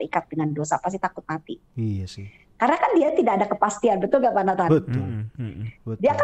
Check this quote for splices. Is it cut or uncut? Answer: uncut